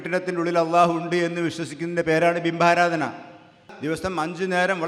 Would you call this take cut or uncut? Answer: cut